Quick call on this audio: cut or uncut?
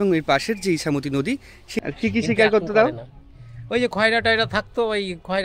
cut